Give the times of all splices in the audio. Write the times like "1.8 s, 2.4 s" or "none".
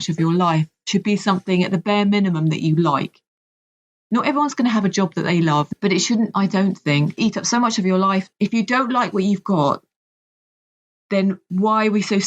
5.7 s, 7.2 s, 8.3 s